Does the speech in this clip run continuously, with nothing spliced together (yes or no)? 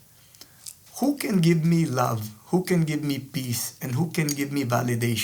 yes